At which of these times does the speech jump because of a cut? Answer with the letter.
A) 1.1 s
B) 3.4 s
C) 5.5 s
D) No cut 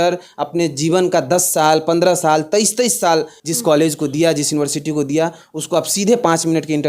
B